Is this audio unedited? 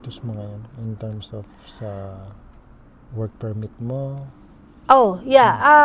yes; 0 cuts

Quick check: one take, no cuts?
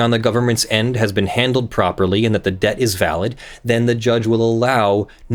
yes; 0 cuts

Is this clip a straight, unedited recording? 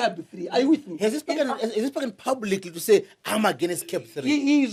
yes; 0 cuts

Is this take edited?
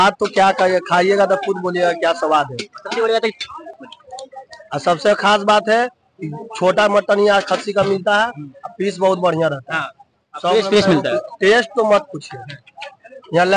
no; 0 cuts

